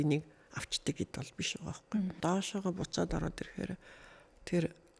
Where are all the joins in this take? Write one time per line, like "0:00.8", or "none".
0:02.1